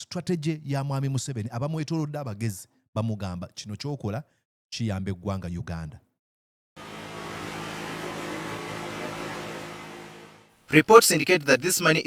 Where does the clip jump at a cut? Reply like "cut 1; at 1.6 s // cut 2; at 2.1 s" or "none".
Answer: none